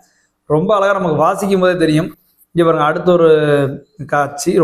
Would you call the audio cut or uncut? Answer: uncut